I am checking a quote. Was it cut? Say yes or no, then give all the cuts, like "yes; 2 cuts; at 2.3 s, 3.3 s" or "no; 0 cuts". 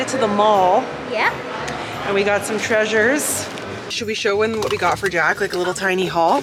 no; 0 cuts